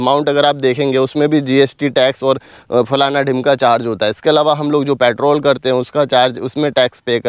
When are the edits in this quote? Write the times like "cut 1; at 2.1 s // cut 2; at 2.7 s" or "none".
none